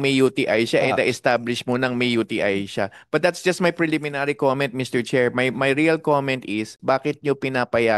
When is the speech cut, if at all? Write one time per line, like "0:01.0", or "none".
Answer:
0:06.7